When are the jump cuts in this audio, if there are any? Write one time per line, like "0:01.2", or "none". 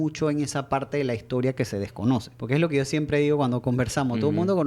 0:02.3